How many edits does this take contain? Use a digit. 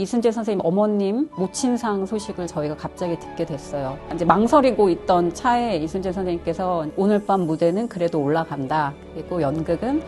2